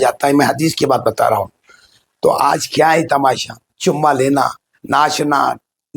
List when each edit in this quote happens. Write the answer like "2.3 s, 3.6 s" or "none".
none